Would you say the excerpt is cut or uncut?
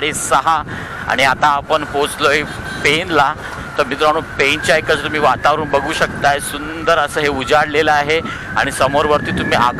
uncut